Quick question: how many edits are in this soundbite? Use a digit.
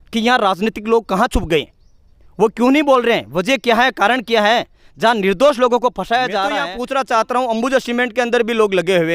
1